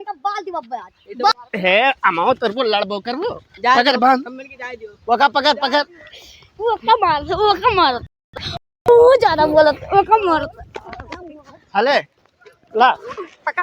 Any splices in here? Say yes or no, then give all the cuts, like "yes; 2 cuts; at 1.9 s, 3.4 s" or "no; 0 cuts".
yes; 1 cut; at 1.3 s